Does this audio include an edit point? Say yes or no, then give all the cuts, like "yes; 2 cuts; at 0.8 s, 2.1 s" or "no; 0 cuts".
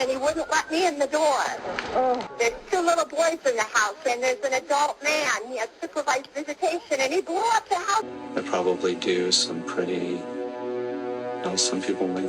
yes; 1 cut; at 8.1 s